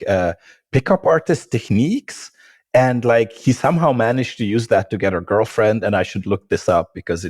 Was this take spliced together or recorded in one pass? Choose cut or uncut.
cut